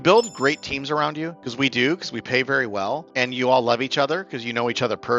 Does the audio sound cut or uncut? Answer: cut